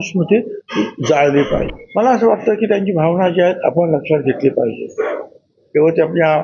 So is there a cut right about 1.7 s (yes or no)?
yes